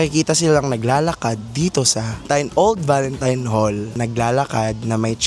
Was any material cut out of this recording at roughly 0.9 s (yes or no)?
no